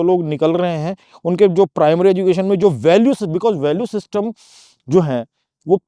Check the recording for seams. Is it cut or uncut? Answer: uncut